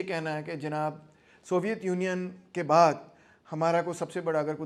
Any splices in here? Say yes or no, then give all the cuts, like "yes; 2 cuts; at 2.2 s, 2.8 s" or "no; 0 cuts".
no; 0 cuts